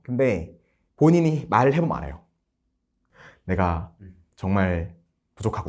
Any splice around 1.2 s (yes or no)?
no